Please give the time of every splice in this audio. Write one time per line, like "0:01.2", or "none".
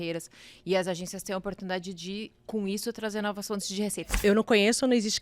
0:04.0

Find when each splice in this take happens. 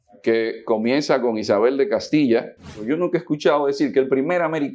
0:02.7

